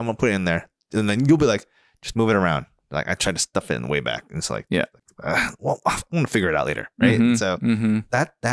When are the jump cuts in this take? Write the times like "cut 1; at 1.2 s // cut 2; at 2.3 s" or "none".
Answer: none